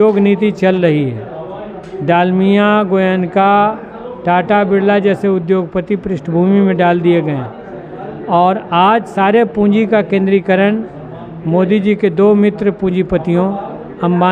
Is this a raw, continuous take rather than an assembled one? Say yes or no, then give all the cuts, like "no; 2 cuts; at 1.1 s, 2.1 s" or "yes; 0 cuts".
yes; 0 cuts